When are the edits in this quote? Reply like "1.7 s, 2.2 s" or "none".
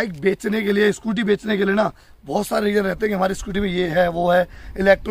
none